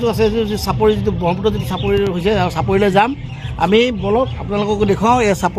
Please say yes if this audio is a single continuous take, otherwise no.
yes